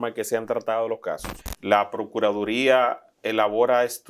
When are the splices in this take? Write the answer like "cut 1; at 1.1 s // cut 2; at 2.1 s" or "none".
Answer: cut 1; at 1.3 s